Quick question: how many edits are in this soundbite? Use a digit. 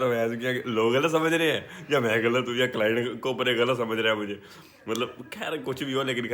0